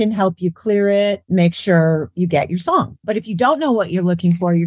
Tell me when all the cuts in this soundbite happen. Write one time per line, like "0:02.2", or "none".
0:01.2
0:03.0